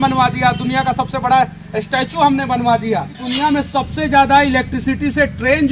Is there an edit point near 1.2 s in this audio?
no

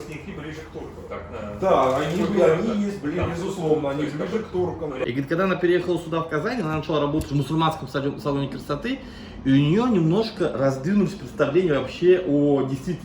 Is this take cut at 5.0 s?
yes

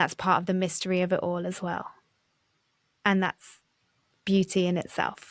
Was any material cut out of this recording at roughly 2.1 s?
no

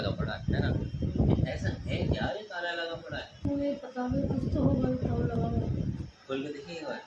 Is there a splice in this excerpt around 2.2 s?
no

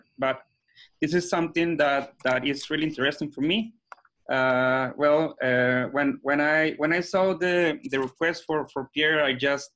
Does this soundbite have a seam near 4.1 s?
no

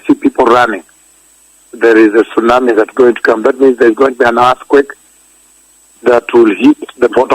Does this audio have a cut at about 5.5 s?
no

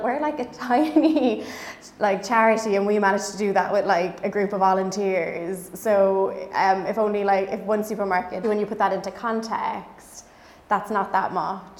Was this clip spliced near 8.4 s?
yes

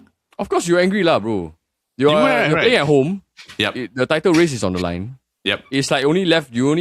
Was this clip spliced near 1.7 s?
no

